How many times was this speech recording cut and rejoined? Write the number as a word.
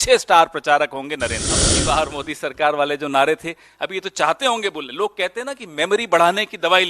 one